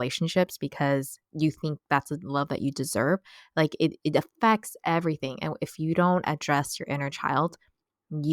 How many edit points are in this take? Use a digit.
1